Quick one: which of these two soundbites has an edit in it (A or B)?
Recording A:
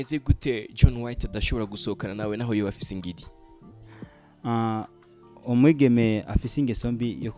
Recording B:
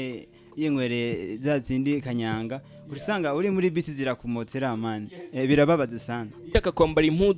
B